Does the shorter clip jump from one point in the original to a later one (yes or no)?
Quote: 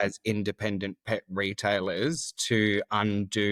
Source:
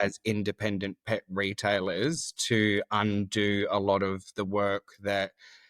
no